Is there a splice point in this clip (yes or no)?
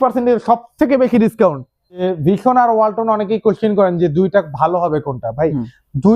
yes